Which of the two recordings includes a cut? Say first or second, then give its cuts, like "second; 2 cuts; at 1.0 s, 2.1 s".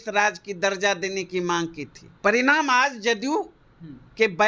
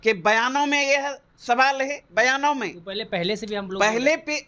first; 1 cut; at 2.0 s